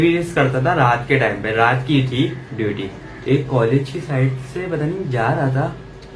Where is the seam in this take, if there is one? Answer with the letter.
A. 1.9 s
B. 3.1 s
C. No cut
B